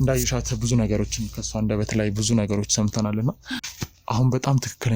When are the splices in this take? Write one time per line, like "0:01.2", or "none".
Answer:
none